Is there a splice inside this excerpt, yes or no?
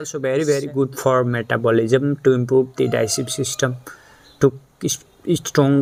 no